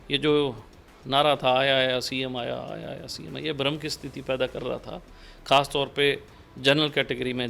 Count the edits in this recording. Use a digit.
0